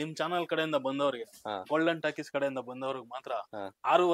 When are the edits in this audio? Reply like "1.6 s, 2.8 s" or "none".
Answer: none